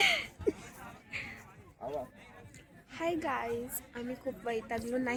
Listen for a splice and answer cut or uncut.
uncut